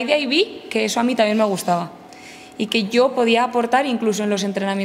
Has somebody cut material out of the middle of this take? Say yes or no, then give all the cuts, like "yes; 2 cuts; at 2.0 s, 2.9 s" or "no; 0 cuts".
no; 0 cuts